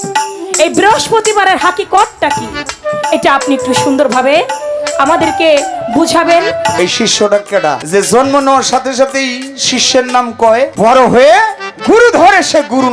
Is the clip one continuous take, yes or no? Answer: no